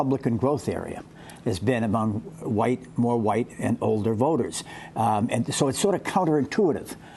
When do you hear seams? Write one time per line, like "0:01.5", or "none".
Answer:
0:04.3

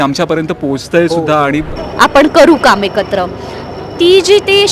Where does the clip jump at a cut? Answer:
0:01.7

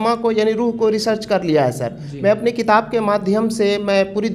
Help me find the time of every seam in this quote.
none

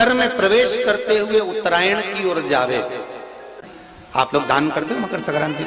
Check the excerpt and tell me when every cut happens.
0:03.6

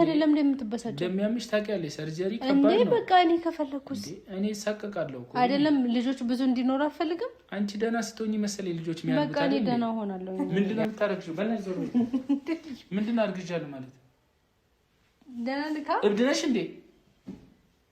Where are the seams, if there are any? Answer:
0:10.3

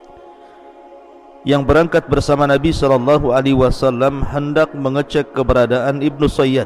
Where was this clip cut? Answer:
0:01.4

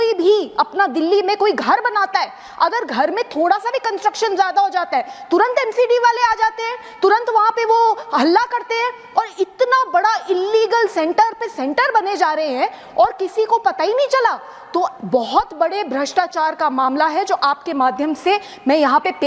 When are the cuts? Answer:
none

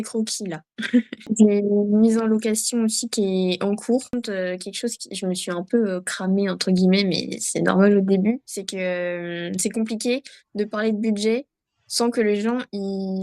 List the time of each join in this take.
0:01.2
0:04.1

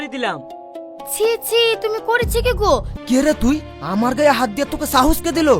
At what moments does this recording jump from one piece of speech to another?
0:02.9

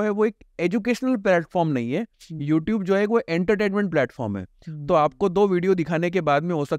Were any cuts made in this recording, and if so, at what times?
none

